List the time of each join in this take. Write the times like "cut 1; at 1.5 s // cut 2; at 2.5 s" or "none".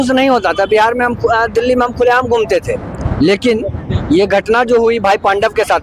none